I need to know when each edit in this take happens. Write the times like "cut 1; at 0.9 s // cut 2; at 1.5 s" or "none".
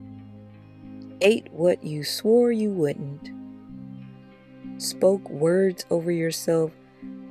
cut 1; at 1.1 s